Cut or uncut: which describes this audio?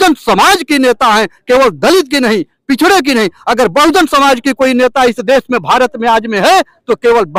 uncut